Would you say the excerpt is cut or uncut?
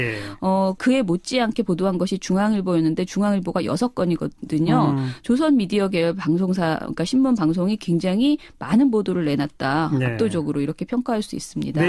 uncut